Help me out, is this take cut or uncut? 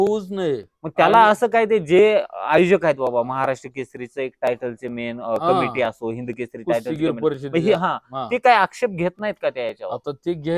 uncut